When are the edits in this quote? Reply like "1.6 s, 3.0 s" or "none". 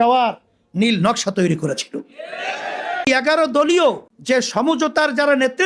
3.1 s, 4.1 s

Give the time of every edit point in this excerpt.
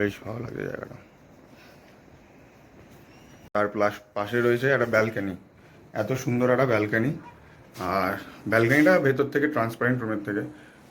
3.5 s

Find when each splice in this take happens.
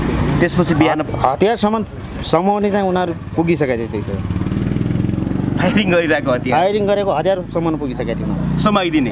none

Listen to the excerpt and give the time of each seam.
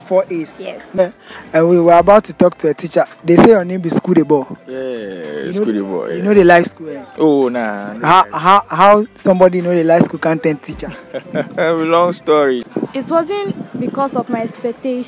1.0 s, 12.6 s

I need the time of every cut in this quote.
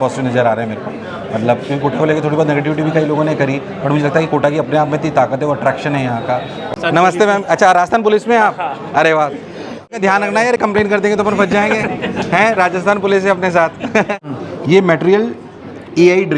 6.6 s, 9.9 s, 14.2 s

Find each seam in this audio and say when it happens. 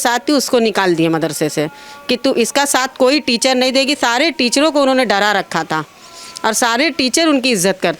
none

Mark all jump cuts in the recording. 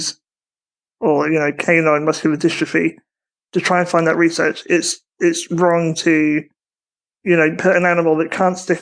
none

